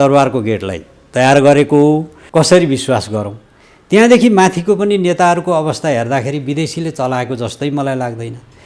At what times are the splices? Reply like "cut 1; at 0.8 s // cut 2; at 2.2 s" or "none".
cut 1; at 2.1 s